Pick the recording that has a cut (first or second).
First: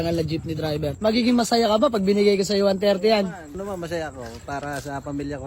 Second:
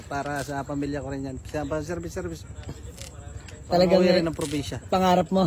first